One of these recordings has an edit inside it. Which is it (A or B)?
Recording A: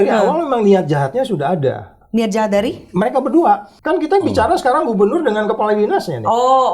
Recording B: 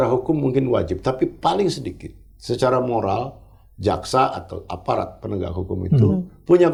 A